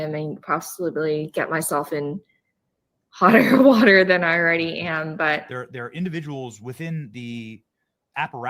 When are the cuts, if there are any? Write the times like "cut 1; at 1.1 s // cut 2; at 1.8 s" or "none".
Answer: cut 1; at 5.5 s

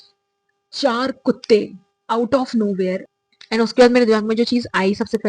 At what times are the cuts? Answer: cut 1; at 3.1 s

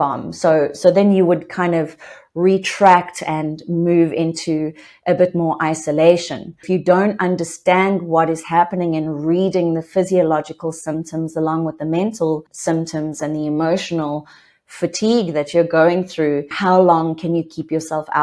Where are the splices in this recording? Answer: cut 1; at 6.6 s // cut 2; at 12.5 s // cut 3; at 16.5 s

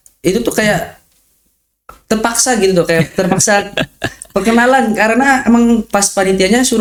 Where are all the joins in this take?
none

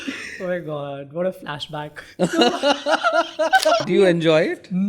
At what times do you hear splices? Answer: cut 1; at 3.8 s

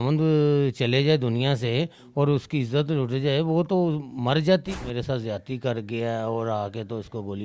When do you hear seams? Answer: cut 1; at 4.7 s

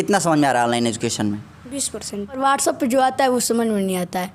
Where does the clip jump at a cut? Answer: cut 1; at 2.4 s

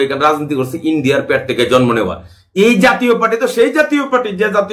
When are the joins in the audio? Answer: none

